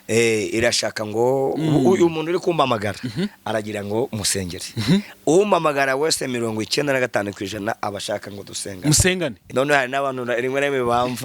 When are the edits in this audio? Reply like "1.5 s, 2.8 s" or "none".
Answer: 9.5 s